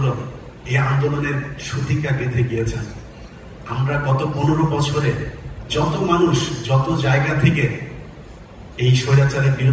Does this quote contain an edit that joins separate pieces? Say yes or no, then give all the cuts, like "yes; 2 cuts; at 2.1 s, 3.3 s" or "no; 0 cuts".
no; 0 cuts